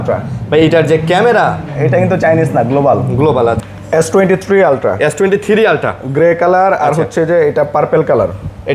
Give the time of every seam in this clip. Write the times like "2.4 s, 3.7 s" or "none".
3.6 s

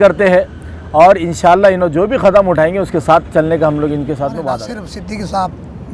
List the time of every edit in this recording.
4.7 s

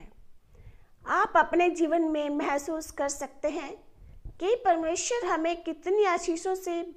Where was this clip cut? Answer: none

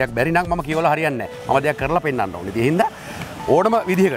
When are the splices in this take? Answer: none

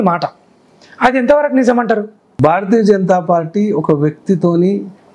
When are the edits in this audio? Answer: 2.2 s

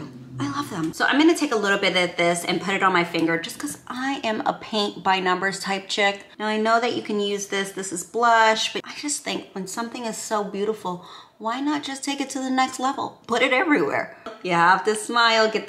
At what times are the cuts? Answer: 0.9 s, 6.3 s, 8.9 s, 13.2 s

